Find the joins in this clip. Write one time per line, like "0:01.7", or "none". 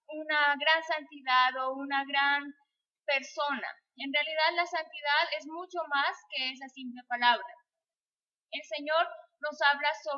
0:07.1